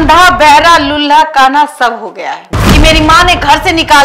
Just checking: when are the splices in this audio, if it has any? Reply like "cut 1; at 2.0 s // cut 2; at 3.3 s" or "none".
cut 1; at 2.6 s

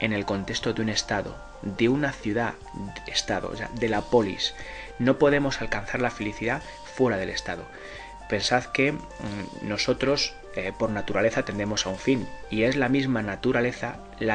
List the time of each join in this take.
none

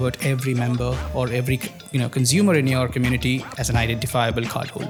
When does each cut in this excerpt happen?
none

